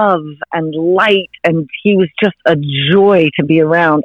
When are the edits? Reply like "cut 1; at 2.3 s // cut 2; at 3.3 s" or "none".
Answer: none